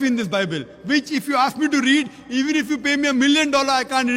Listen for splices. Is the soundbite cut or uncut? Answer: uncut